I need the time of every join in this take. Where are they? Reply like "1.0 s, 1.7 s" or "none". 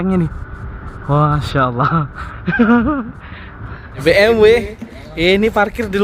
3.8 s

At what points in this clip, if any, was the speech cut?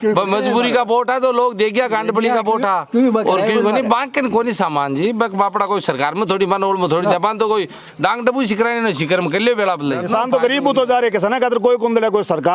10.0 s

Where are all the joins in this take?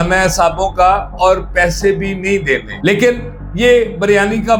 none

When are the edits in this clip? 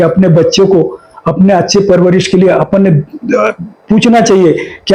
none

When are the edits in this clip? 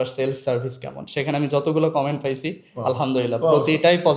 none

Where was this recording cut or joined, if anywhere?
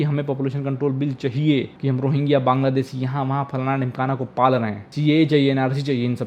1.7 s, 4.8 s

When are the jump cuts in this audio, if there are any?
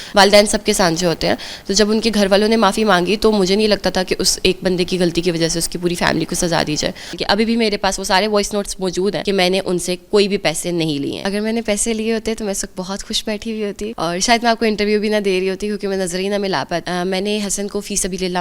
7.1 s, 9.2 s, 11.2 s, 13.9 s, 16.8 s

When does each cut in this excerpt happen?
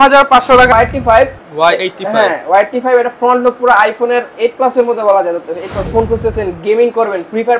0.7 s, 5.8 s

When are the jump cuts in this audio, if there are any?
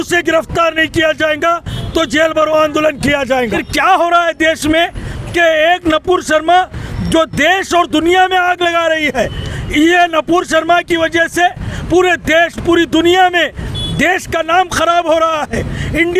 3.6 s

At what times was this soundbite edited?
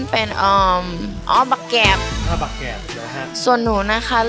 none

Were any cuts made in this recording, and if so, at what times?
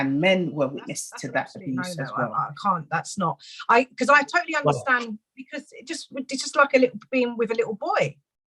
2.3 s

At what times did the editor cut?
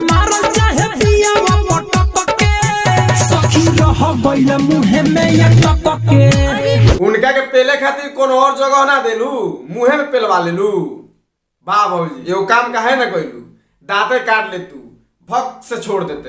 6.7 s, 12.2 s

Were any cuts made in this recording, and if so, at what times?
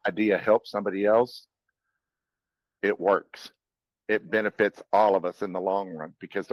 none

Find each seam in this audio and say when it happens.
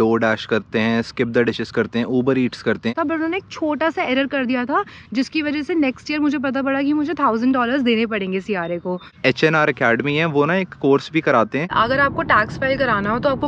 2.9 s, 9.2 s, 11.7 s

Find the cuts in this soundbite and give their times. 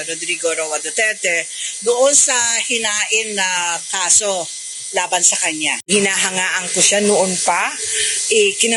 none

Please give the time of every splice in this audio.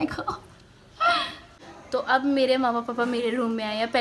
1.4 s

